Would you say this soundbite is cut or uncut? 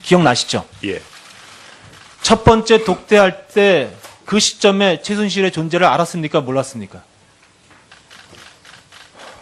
uncut